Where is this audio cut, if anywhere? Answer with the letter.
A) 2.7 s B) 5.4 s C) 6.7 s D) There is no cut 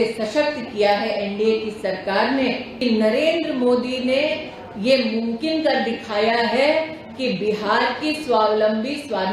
A